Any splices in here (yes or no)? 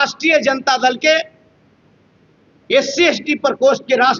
no